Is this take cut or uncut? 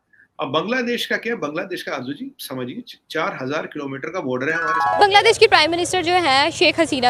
cut